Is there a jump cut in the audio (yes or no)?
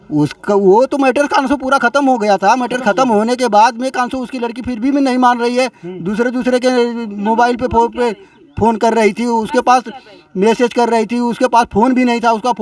no